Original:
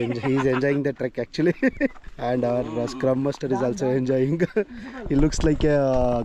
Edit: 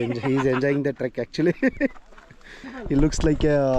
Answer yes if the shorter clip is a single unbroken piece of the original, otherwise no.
no